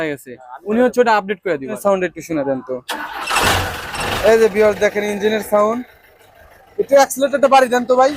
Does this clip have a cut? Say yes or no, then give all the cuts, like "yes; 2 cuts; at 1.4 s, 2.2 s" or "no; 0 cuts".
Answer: yes; 1 cut; at 1.8 s